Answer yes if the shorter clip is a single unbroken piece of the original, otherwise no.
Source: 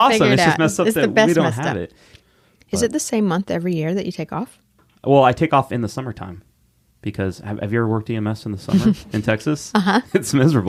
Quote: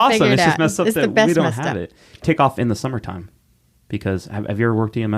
no